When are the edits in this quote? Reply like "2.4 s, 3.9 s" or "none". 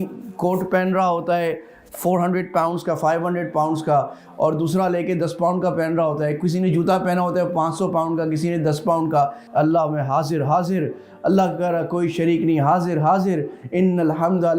9.4 s